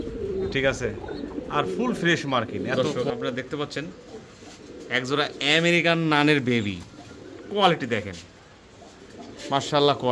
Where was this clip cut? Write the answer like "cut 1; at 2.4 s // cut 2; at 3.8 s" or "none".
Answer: cut 1; at 2.8 s

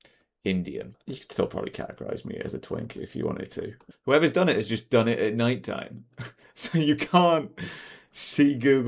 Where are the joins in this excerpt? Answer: cut 1; at 1.0 s // cut 2; at 3.9 s

